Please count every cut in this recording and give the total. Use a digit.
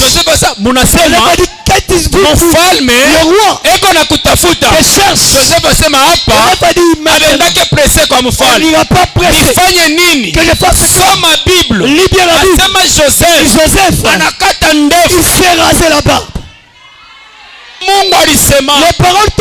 1